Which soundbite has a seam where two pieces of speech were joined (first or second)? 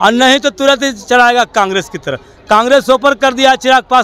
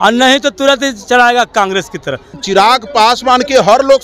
second